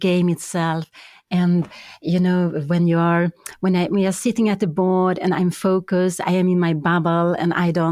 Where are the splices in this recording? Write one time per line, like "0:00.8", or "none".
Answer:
none